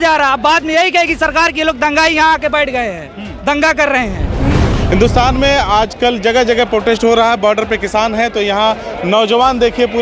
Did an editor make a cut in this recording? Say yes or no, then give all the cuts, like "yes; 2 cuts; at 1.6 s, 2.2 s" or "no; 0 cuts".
yes; 1 cut; at 4.7 s